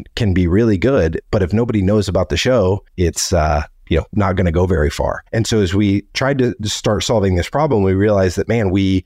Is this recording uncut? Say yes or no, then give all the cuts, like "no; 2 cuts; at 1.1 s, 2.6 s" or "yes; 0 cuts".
no; 2 cuts; at 2.9 s, 5.2 s